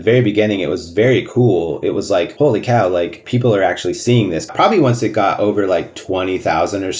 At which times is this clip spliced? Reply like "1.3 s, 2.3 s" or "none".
2.3 s, 3.2 s, 4.5 s, 6.0 s